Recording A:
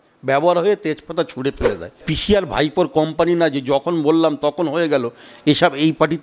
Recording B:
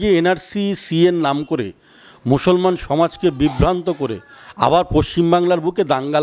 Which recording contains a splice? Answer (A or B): A